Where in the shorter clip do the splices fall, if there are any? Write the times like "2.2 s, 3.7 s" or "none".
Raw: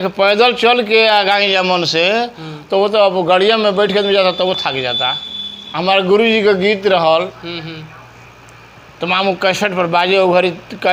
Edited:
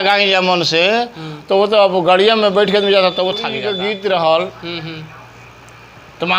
3.7 s